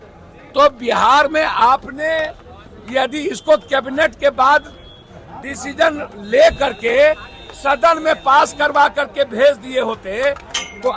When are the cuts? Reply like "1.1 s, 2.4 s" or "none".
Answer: none